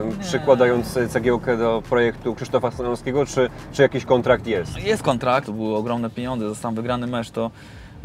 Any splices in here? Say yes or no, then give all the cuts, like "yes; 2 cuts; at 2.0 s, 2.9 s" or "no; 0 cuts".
yes; 1 cut; at 5.5 s